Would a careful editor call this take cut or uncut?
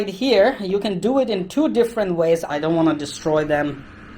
cut